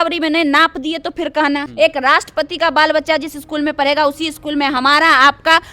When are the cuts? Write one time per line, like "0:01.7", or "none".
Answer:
0:01.7